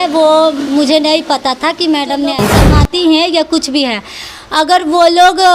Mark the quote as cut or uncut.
cut